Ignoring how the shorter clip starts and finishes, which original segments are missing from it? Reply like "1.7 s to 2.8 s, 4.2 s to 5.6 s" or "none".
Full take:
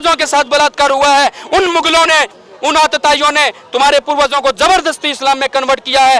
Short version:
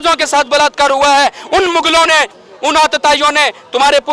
none